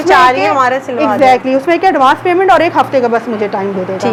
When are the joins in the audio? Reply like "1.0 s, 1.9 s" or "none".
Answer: none